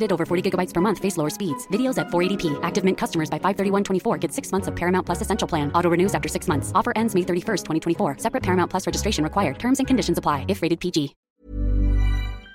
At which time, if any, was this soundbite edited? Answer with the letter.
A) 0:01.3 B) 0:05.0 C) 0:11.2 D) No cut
C